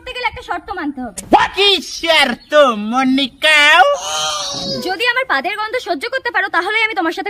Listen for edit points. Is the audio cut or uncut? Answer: uncut